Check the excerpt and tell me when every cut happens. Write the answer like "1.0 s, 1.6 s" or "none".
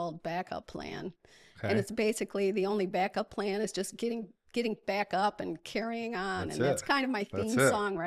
none

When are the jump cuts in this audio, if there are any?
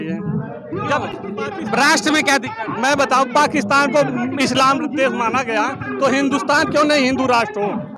none

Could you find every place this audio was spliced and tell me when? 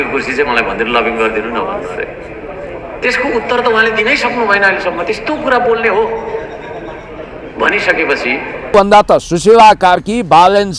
8.7 s

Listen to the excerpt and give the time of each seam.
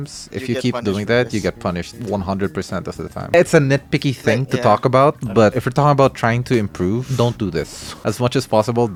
none

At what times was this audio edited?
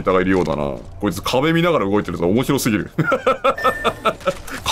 none

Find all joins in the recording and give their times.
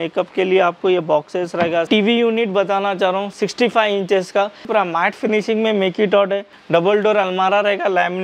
1.9 s, 4.7 s, 6.5 s

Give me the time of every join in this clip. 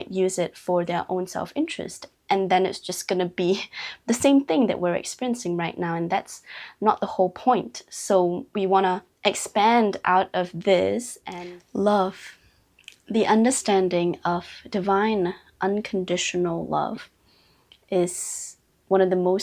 11.2 s

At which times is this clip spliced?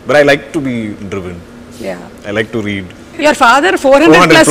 3.1 s

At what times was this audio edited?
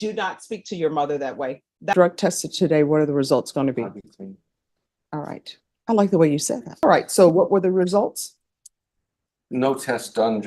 1.9 s, 6.8 s

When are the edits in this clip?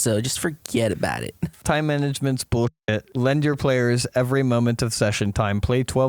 1.6 s, 3.0 s

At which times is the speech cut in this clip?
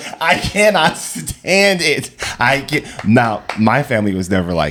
none

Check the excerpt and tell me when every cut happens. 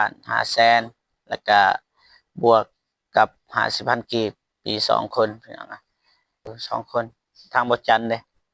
6.4 s

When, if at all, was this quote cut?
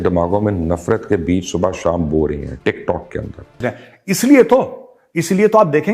3.6 s

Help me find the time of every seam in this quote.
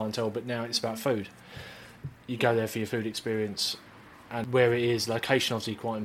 4.4 s

